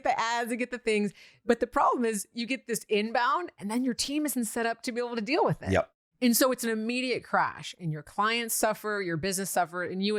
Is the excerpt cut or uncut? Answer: uncut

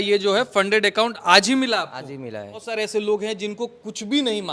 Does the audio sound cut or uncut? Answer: cut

